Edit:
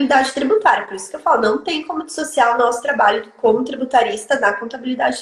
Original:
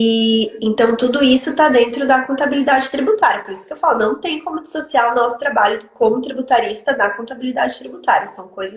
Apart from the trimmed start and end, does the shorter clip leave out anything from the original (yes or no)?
no